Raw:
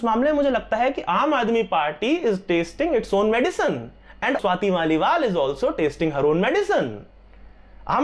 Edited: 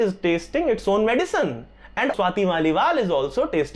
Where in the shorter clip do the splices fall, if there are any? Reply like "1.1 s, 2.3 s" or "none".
none